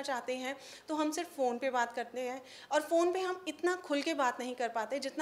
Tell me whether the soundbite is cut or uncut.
uncut